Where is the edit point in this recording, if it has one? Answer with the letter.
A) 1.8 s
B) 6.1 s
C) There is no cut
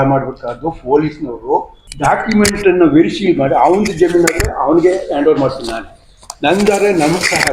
A